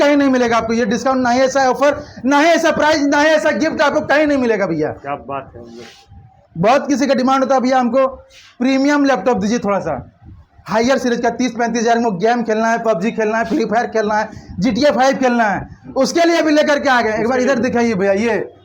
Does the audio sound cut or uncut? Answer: uncut